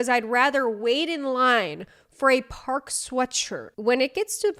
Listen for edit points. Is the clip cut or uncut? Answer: cut